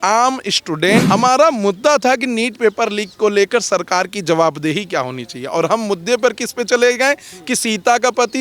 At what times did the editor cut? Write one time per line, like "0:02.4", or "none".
0:01.1